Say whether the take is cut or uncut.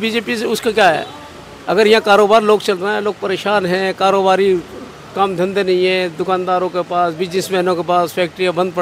uncut